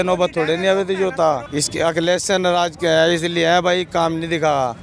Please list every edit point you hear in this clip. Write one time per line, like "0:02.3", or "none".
0:01.5